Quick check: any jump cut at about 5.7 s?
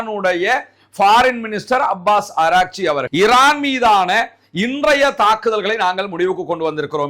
no; 1 cut; at 3.0 s

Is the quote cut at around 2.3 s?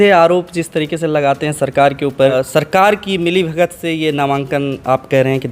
yes; 1 cut; at 2.3 s

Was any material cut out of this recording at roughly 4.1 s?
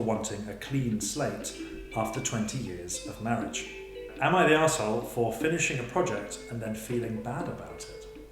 yes; 1 cut; at 4.1 s

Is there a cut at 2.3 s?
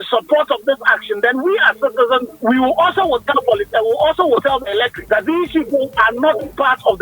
yes; 2 cuts; at 2.3 s, 5.0 s

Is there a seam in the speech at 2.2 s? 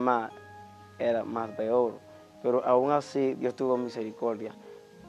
no; 0 cuts

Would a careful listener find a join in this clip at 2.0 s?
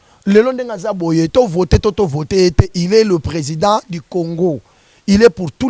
no; 0 cuts

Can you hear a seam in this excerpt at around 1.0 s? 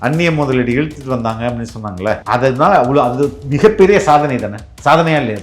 no; 1 cut; at 2.2 s

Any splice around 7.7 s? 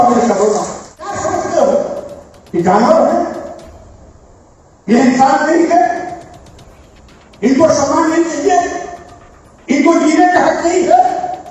no; 1 cut; at 1.2 s

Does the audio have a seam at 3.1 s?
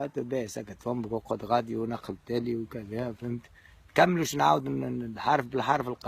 no; 1 cut; at 1.3 s

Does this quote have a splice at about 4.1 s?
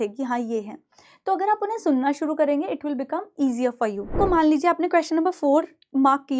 yes; 1 cut; at 4.1 s

